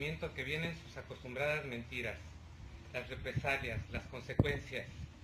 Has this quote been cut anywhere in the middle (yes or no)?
yes